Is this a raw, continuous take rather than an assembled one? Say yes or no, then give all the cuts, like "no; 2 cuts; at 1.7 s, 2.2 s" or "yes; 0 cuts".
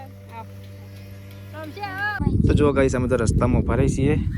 no; 1 cut; at 2.2 s